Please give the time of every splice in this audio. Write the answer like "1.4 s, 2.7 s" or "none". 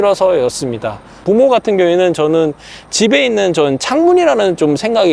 1.2 s

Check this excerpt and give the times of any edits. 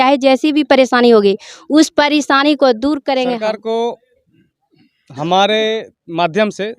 3.4 s

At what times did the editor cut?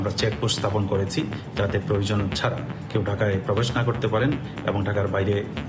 none

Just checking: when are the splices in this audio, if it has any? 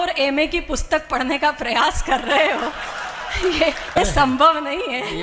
4.0 s

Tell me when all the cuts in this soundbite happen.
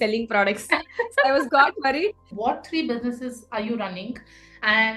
2.3 s

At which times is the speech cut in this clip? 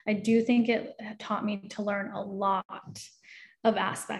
none

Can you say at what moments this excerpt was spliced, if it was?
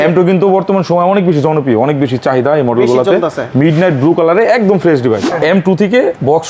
5.3 s

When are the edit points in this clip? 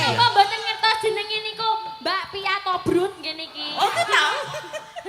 none

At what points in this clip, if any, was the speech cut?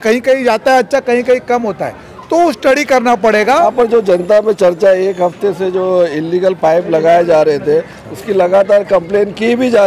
3.7 s

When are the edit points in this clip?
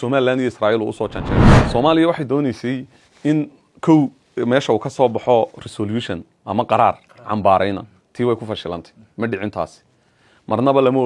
1.5 s

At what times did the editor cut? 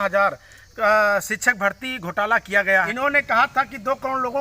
2.9 s

